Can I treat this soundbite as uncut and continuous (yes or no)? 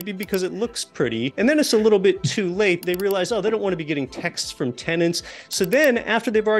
no